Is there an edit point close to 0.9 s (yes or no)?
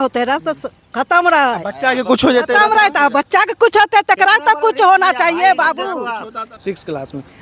no